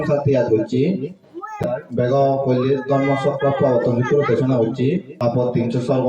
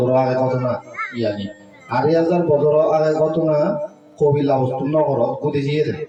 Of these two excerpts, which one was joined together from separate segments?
first; 2 cuts; at 1.6 s, 5.1 s

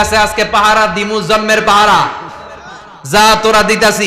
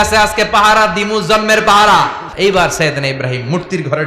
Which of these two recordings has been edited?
second; 1 cut; at 2.2 s

